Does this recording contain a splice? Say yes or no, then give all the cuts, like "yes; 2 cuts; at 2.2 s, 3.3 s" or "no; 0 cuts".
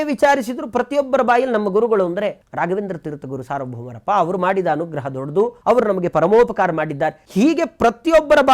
yes; 3 cuts; at 2.4 s, 5.6 s, 7.2 s